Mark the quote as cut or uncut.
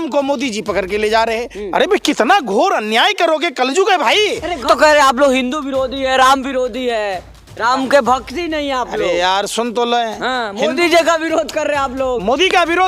cut